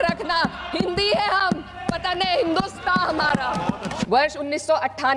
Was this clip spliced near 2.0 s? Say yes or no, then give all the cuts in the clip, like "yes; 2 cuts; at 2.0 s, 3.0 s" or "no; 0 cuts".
no; 1 cut; at 3.9 s